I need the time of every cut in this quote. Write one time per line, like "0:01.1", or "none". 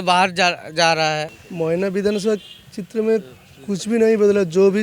0:01.4